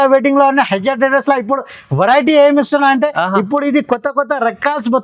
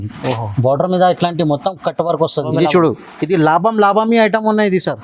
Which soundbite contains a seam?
second; 1 cut; at 2.5 s

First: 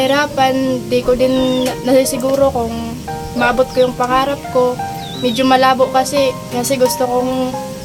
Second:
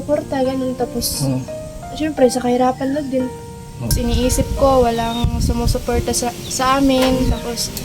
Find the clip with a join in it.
second; 1 cut; at 3.9 s

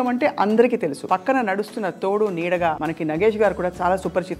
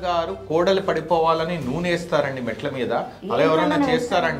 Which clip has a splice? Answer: first; 2 cuts; at 1.0 s, 2.8 s

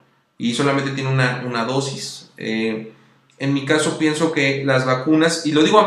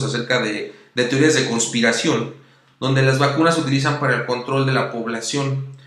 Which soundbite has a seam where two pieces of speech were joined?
first; 1 cut; at 3.6 s

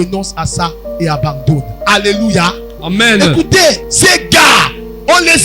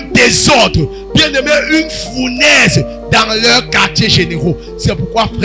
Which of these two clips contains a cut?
first; 1 cut; at 3.9 s

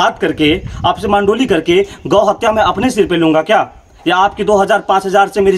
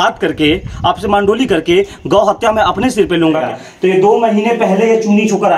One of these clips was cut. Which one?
second; 1 cut; at 3.4 s

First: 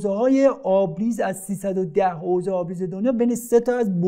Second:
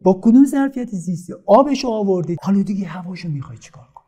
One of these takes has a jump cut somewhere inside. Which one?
second; 1 cut; at 2.3 s

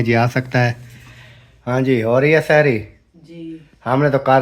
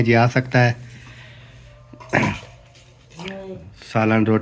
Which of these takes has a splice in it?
first; 1 cut; at 1.6 s

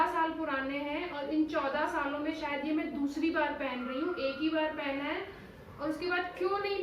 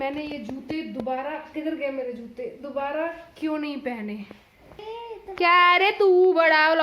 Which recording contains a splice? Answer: second; 1 cut; at 4.8 s

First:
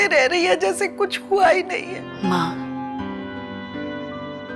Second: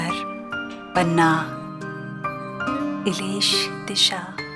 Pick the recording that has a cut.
first; 1 cut; at 2.0 s

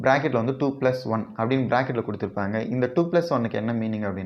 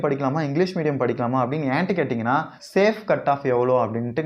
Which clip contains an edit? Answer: second; 1 cut; at 2.6 s

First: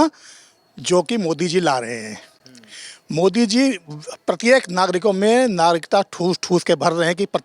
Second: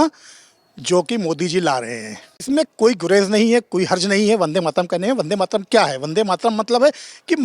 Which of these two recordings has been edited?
second; 1 cut; at 2.4 s

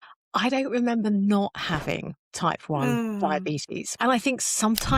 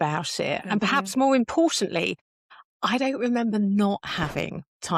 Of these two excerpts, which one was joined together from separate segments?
first; 1 cut; at 3.8 s

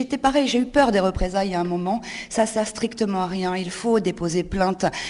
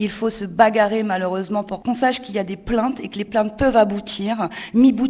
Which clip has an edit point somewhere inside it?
second; 2 cuts; at 1.7 s, 3.3 s

